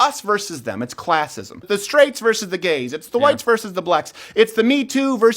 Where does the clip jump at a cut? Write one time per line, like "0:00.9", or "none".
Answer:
0:01.6

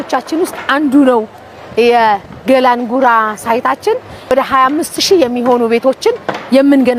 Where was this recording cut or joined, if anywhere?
0:04.3

